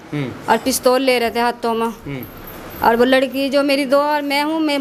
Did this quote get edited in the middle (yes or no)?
no